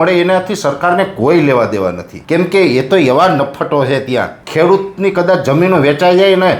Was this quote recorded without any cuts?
no; 2 cuts; at 2.1 s, 4.4 s

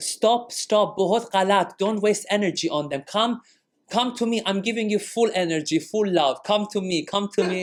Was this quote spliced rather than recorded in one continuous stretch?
no; 0 cuts

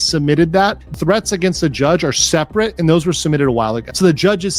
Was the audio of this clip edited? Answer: yes; 1 cut; at 0.9 s

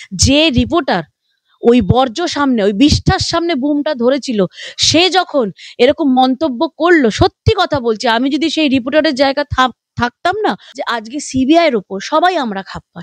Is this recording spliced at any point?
yes; 1 cut; at 10.7 s

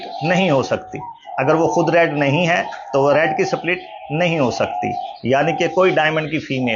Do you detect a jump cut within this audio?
no; 0 cuts

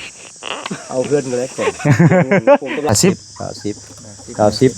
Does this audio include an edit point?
yes; 1 cut; at 2.9 s

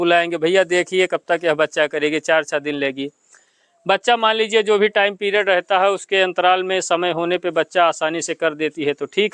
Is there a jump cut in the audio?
no; 0 cuts

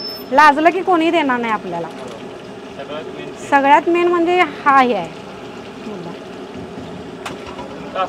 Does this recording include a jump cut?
no; 0 cuts

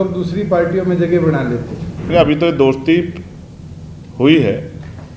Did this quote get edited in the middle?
yes; 1 cut; at 2.1 s

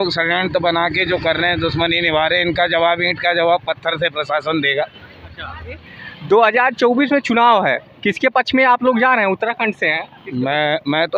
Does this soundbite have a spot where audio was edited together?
yes; 1 cut; at 5.9 s

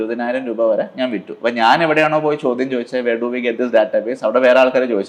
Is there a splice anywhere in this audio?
no; 0 cuts

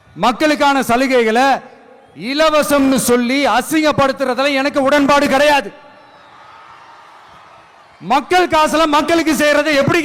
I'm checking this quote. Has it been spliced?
no; 0 cuts

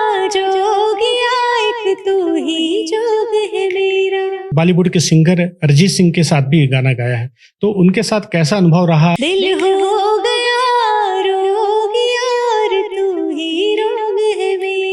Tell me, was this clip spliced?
yes; 2 cuts; at 4.5 s, 9.2 s

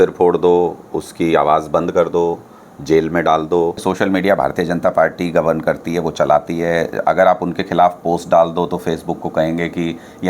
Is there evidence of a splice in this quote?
yes; 1 cut; at 3.8 s

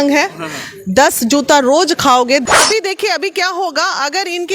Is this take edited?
yes; 1 cut; at 2.4 s

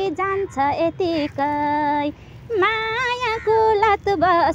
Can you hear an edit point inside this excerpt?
no; 0 cuts

